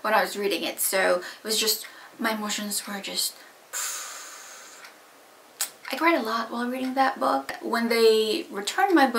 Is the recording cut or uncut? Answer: cut